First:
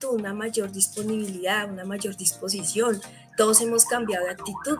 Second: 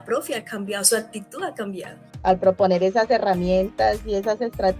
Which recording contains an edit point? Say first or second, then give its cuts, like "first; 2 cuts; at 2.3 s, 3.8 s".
second; 1 cut; at 2.0 s